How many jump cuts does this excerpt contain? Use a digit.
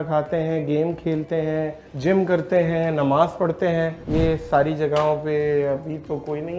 2